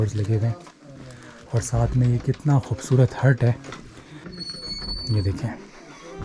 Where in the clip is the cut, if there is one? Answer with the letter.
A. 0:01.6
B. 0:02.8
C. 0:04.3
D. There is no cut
C